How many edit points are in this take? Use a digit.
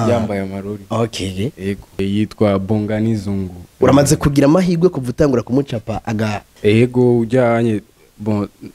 2